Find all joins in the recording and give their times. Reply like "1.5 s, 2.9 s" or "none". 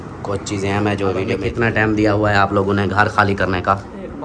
1.4 s